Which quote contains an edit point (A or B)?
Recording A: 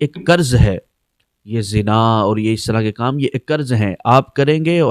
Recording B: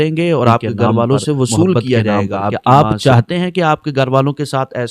B